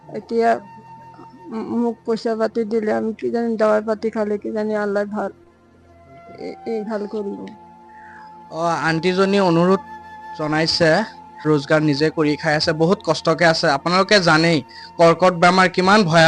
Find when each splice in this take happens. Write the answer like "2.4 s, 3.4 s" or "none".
none